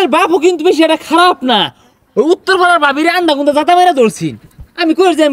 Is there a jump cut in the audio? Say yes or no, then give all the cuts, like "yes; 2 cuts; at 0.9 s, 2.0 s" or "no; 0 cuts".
no; 0 cuts